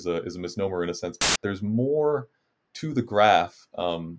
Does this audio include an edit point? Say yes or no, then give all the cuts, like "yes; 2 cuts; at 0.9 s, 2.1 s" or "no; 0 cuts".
yes; 1 cut; at 1.4 s